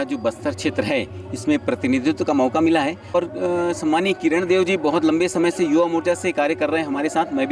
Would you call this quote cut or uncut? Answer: cut